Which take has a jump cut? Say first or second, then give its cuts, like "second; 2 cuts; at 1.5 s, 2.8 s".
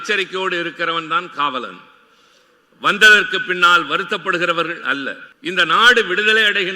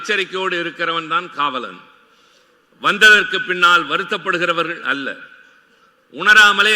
first; 1 cut; at 5.2 s